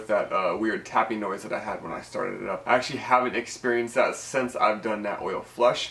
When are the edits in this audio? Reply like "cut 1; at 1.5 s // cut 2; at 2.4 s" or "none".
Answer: cut 1; at 2.6 s